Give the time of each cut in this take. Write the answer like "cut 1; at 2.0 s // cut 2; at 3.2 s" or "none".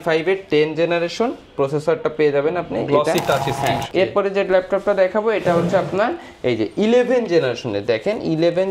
cut 1; at 3.9 s